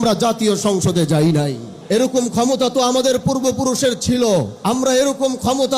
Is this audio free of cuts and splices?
no; 2 cuts; at 1.7 s, 4.5 s

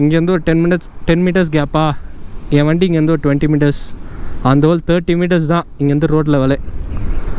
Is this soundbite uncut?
yes; 0 cuts

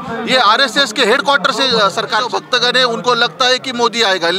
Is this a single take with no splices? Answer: no; 1 cut; at 2.2 s

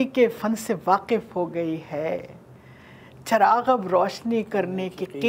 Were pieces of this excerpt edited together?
no; 0 cuts

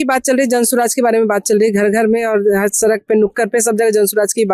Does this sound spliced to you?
no; 0 cuts

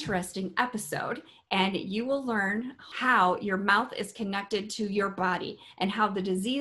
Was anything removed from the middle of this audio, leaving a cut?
yes; 1 cut; at 2.8 s

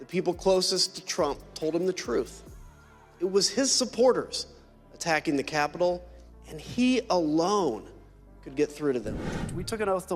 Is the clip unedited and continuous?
no; 1 cut; at 9.1 s

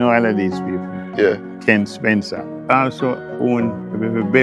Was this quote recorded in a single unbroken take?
no; 2 cuts; at 1.5 s, 2.5 s

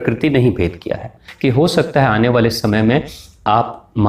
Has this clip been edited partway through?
yes; 1 cut; at 1.3 s

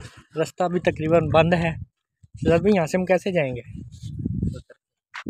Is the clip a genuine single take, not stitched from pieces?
yes; 0 cuts

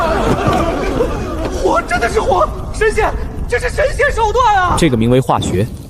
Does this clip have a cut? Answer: yes; 1 cut; at 4.7 s

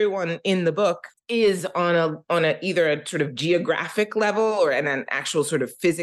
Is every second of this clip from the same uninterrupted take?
no; 1 cut; at 1.1 s

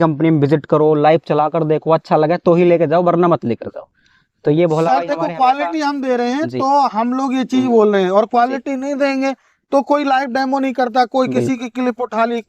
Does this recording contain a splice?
no; 0 cuts

